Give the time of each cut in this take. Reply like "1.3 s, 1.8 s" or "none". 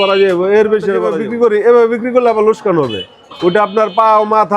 1.2 s